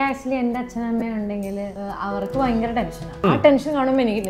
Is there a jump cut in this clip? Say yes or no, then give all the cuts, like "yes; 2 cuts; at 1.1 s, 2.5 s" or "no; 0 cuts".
yes; 2 cuts; at 1.8 s, 3.2 s